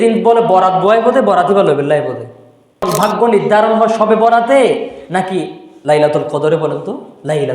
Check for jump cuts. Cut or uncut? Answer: cut